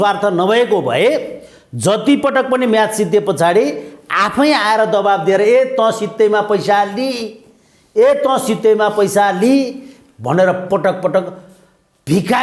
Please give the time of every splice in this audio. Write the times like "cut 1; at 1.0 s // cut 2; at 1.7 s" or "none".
none